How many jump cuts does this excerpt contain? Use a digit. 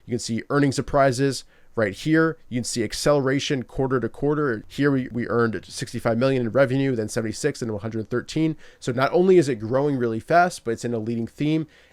1